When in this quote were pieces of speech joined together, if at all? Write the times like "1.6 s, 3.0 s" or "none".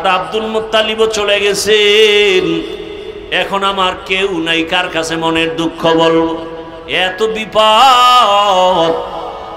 none